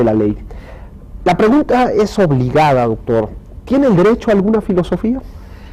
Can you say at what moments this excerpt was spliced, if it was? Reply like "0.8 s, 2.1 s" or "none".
4.2 s